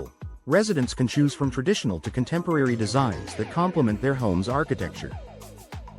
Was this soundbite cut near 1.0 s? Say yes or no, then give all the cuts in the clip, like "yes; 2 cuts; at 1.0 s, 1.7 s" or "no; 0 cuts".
no; 1 cut; at 5.0 s